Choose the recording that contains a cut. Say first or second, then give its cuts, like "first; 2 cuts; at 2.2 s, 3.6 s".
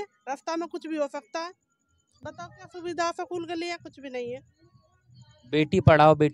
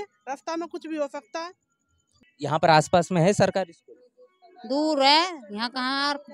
second; 1 cut; at 2.2 s